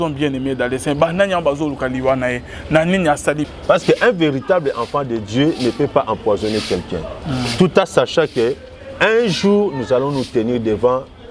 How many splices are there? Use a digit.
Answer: 1